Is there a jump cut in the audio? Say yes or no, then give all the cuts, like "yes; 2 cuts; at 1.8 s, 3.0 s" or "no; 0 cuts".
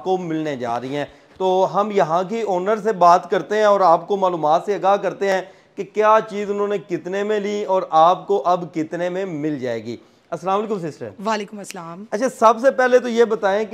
no; 0 cuts